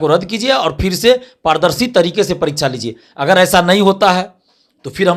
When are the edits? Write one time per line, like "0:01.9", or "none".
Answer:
none